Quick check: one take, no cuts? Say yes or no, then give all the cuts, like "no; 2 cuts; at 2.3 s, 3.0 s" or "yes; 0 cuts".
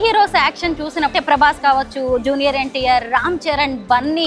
no; 1 cut; at 1.1 s